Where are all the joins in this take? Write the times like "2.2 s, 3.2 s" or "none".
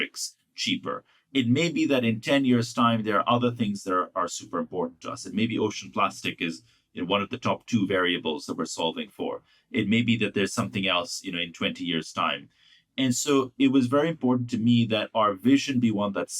none